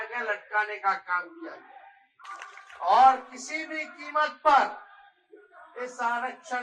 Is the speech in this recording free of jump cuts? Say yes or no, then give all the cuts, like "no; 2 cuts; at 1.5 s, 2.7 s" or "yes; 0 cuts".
no; 1 cut; at 2.2 s